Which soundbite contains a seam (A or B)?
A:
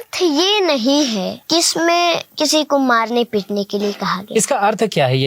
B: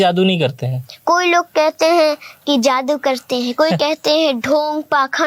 A